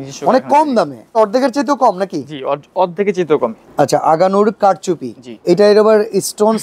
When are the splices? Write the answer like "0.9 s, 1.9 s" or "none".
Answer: 1.2 s, 3.6 s, 5.4 s